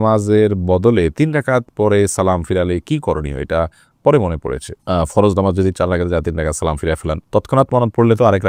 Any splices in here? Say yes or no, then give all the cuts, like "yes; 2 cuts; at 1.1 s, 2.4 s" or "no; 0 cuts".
no; 0 cuts